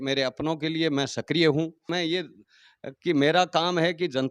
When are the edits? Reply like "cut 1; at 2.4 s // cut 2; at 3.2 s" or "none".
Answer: cut 1; at 1.9 s